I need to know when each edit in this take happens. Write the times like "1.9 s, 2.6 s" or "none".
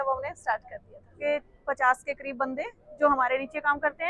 1.2 s